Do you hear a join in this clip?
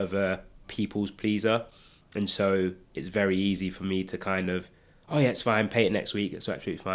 no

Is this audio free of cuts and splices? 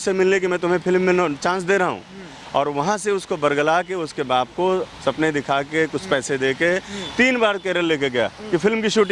yes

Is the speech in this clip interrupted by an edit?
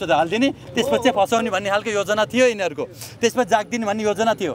no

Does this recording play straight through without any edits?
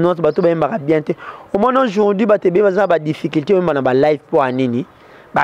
yes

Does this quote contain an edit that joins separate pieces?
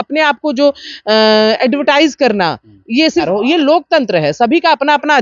yes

